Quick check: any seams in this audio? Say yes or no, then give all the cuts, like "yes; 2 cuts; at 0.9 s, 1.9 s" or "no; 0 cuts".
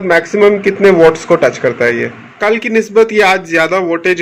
yes; 1 cut; at 2.3 s